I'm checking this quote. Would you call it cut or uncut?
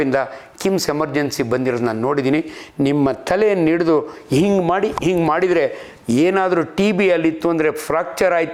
uncut